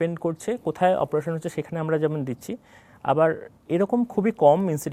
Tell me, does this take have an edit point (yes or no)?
no